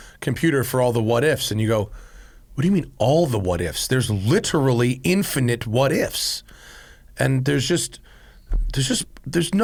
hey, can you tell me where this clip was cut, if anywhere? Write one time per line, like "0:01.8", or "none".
none